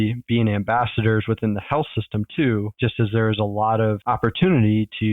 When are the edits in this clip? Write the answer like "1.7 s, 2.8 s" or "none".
4.0 s